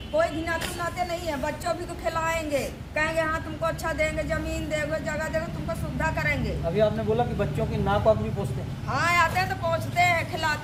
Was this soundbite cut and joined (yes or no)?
no